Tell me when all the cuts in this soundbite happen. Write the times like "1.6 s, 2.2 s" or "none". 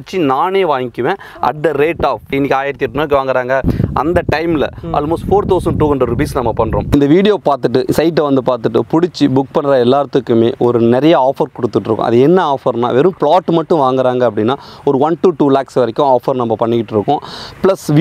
2.3 s, 3.6 s, 6.8 s